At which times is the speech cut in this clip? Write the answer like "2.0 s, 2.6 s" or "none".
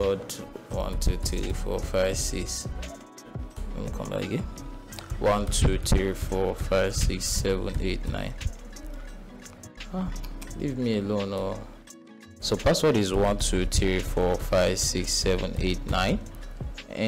none